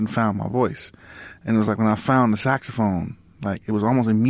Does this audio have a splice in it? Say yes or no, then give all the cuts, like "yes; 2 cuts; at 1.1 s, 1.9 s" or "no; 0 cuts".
no; 0 cuts